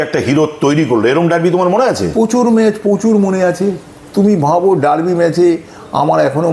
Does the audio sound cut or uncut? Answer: uncut